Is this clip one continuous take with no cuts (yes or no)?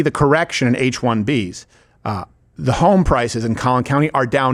yes